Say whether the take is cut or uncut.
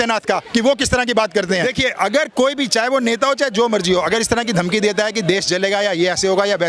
cut